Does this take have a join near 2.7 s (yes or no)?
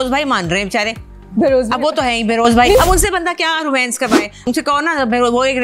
yes